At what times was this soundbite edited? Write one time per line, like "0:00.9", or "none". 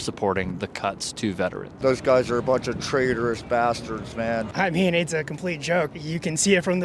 0:01.8
0:04.5
0:05.9